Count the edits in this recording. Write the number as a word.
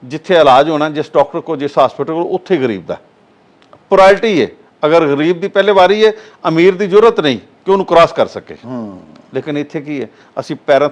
zero